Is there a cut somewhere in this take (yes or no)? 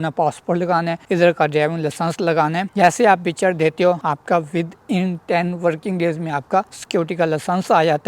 yes